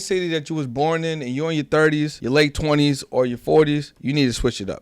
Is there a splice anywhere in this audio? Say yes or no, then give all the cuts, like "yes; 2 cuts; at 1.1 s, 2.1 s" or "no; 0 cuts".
yes; 2 cuts; at 2.2 s, 3.9 s